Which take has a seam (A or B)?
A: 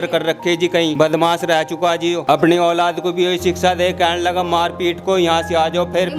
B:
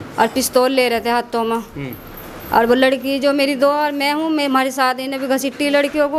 A